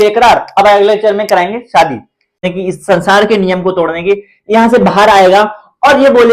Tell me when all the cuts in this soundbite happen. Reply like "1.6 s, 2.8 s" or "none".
2.5 s